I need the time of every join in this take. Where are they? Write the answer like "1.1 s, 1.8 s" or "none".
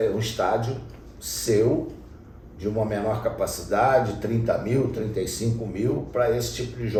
none